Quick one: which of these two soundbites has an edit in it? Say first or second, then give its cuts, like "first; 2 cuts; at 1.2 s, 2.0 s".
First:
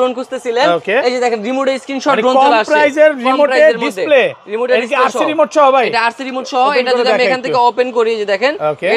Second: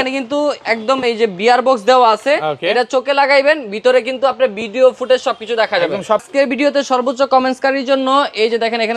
second; 1 cut; at 6.3 s